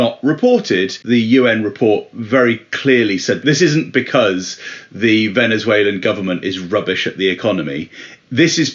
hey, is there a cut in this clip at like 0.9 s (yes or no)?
yes